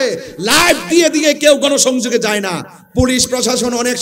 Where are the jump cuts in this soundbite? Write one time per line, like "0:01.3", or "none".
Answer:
none